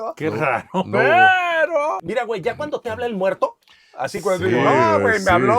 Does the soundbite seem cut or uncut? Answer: cut